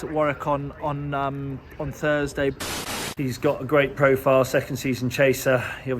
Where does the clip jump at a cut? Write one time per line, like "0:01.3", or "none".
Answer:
0:02.6